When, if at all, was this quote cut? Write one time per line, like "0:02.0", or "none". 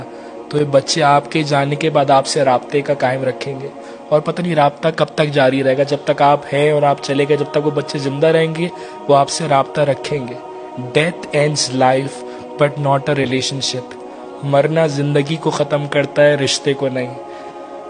none